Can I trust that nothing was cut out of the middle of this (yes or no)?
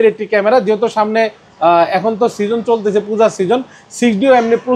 yes